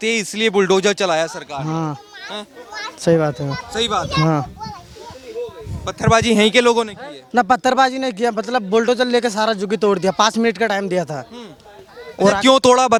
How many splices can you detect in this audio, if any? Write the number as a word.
zero